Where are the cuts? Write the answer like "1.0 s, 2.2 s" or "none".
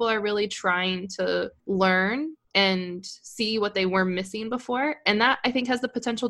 1.6 s